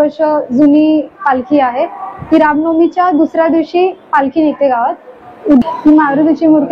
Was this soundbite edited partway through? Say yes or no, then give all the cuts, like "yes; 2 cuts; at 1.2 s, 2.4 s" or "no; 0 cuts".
yes; 1 cut; at 5.6 s